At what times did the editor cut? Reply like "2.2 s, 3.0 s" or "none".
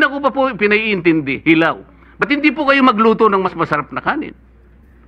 none